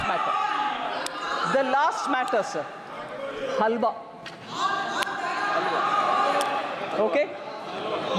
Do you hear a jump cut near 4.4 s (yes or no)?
no